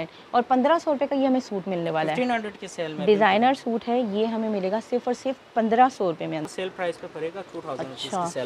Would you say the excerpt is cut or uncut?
cut